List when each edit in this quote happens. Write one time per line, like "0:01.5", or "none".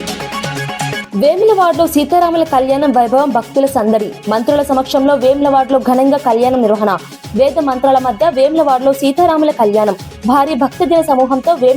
0:01.0

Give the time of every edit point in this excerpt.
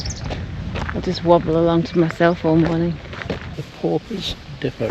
0:03.5

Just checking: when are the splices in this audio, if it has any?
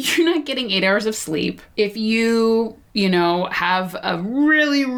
0:01.6
0:02.8

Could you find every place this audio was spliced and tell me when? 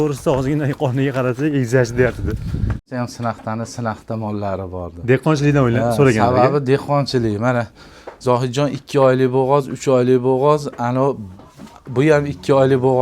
0:02.9

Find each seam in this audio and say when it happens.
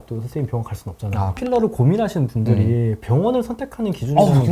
0:01.3

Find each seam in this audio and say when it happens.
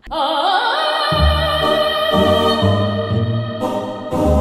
none

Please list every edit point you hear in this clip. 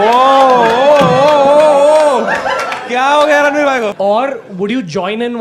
0:03.9

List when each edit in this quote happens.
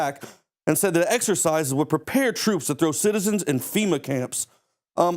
0:03.2

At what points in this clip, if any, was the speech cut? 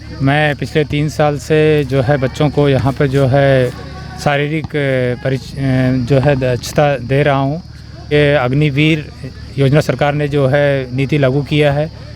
0:08.1

